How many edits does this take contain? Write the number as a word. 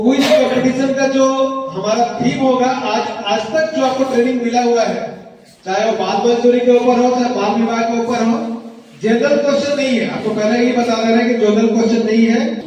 zero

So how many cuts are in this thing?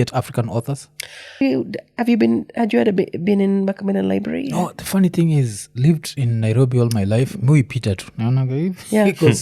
one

